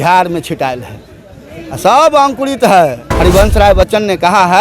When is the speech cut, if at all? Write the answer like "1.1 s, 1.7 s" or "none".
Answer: 3.0 s